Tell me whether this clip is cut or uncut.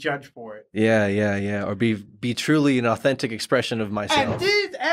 uncut